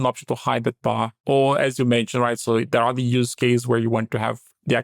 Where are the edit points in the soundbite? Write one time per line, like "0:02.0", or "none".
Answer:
0:01.2

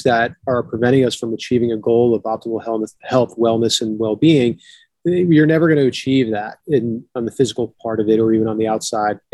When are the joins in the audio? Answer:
none

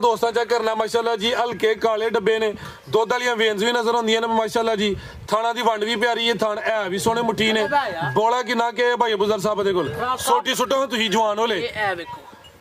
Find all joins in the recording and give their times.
none

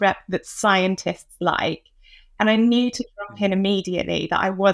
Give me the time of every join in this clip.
none

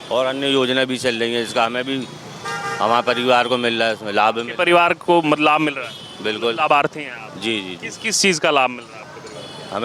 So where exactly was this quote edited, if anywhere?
none

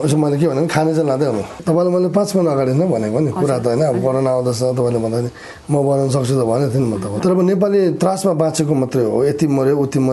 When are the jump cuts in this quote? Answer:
0:01.5
0:07.2

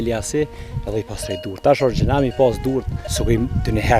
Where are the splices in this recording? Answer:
0:03.0

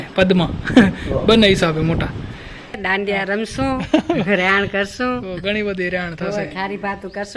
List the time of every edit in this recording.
0:02.8

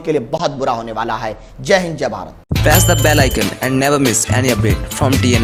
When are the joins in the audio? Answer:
none

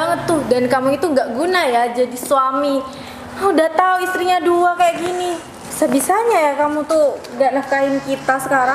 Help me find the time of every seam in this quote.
none

